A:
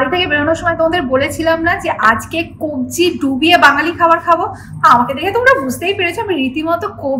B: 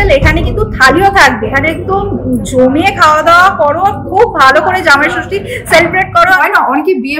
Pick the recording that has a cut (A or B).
B